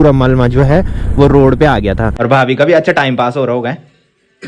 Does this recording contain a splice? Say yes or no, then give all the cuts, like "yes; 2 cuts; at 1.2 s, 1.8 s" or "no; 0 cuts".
yes; 1 cut; at 2.1 s